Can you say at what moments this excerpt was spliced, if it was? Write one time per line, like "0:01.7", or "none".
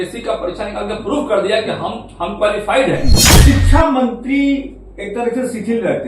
0:03.3